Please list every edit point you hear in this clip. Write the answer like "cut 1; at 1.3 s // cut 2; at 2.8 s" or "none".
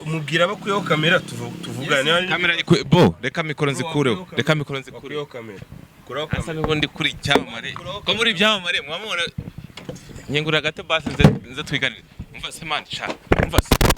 none